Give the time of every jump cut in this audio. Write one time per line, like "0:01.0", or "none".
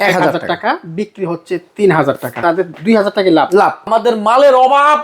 0:02.3
0:03.9